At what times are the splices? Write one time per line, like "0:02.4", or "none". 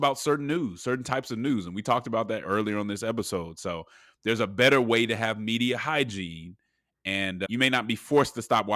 0:02.4
0:07.5